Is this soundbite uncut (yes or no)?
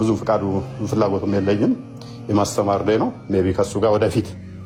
yes